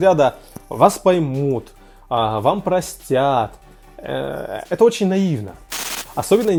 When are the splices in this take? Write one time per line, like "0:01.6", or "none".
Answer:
none

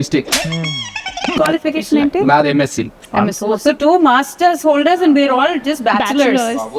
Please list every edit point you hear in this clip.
0:01.4

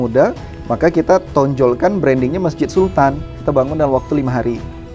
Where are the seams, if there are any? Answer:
0:03.3

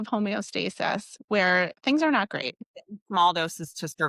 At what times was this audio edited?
0:02.6

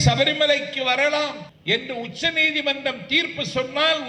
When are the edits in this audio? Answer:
0:01.5

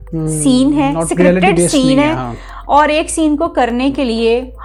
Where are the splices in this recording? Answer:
none

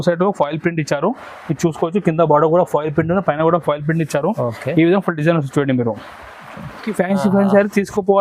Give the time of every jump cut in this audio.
0:06.9

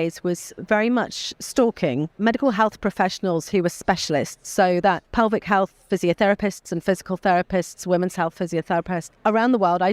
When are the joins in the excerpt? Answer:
0:02.1
0:05.0
0:09.1

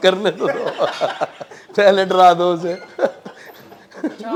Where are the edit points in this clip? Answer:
none

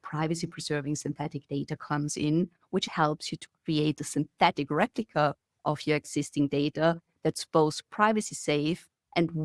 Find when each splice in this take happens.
0:02.9

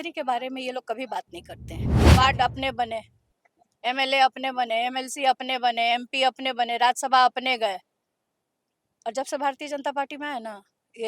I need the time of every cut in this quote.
0:01.9

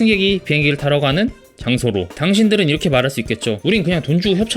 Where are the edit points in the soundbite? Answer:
0:02.1

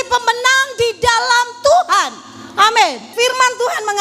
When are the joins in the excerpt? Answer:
0:03.1

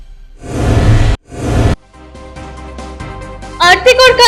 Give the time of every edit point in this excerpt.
none

